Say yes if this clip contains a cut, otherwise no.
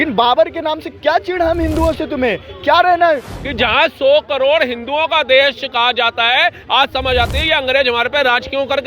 yes